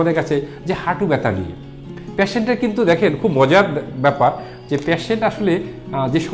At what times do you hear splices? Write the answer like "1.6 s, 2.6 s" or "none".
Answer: none